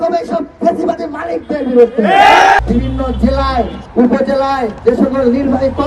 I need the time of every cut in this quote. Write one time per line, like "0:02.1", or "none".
0:02.6
0:03.8
0:04.7